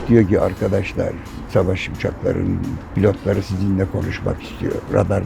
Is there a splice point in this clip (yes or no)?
no